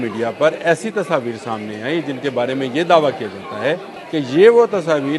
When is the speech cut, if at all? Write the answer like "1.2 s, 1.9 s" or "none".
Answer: 3.9 s